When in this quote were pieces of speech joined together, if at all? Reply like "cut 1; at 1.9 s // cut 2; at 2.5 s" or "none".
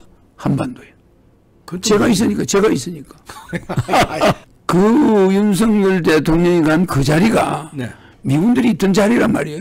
cut 1; at 4.1 s